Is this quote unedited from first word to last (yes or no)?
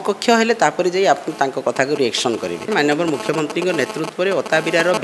no